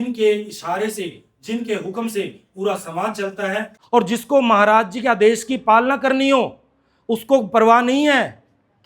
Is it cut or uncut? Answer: cut